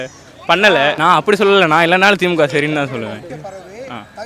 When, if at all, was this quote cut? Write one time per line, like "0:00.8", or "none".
0:01.0
0:03.3